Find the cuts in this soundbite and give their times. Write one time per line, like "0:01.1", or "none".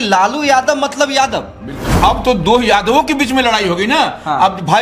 0:01.9